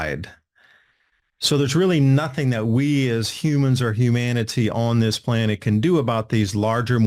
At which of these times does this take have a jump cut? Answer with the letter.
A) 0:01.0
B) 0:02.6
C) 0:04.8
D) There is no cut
D